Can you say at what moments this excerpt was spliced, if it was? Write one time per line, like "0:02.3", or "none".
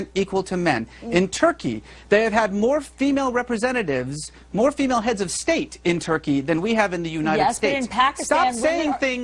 none